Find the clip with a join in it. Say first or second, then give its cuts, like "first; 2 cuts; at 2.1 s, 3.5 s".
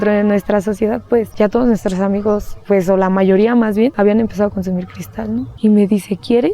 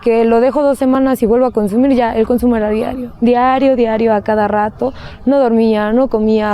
first; 3 cuts; at 1.3 s, 3.9 s, 5.5 s